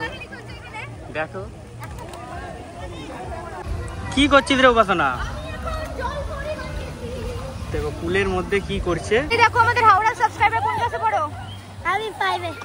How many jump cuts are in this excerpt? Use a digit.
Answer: 2